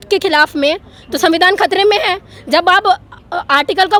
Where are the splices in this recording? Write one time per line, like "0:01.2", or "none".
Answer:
none